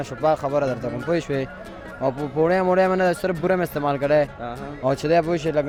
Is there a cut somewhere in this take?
no; 0 cuts

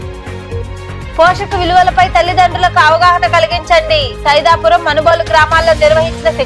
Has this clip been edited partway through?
yes; 1 cut; at 1.1 s

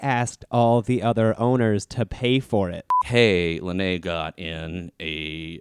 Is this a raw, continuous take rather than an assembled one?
no; 1 cut; at 3.0 s

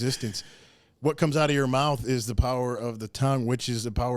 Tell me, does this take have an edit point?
no; 0 cuts

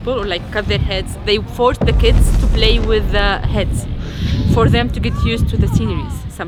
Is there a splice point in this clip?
no; 0 cuts

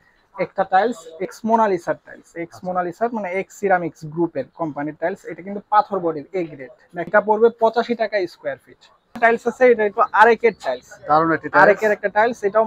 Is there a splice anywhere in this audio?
yes; 3 cuts; at 1.3 s, 7.1 s, 9.2 s

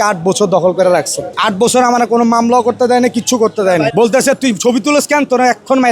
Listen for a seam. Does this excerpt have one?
yes; 2 cuts; at 1.3 s, 3.9 s

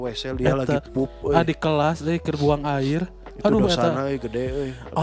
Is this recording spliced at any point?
no; 0 cuts

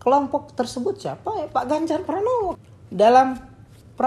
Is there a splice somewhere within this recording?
yes; 1 cut; at 2.5 s

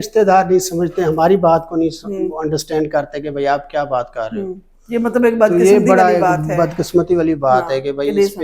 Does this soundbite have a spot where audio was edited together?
no; 0 cuts

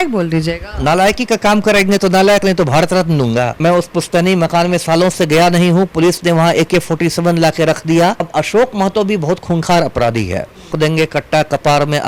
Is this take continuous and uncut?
no; 3 cuts; at 3.5 s, 8.2 s, 10.7 s

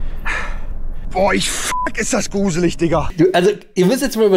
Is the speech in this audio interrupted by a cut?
yes; 1 cut; at 3.1 s

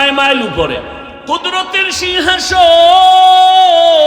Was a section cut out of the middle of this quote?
yes; 1 cut; at 1.1 s

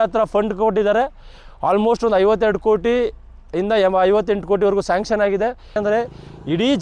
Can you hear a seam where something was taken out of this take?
yes; 1 cut; at 5.8 s

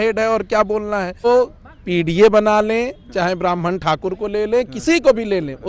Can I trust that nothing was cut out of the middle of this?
no; 1 cut; at 1.2 s

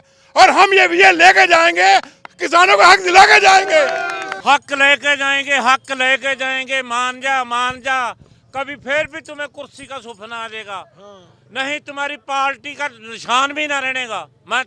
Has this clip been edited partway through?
yes; 1 cut; at 4.3 s

